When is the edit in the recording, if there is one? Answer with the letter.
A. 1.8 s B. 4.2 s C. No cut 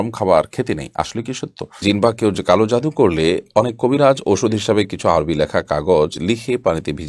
A